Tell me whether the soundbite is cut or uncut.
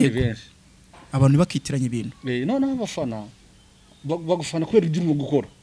uncut